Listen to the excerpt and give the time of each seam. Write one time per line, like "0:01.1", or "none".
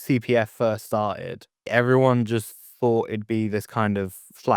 0:01.7